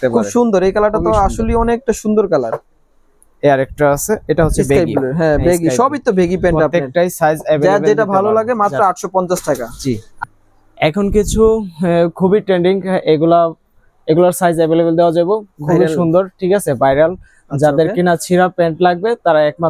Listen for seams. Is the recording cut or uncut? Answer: uncut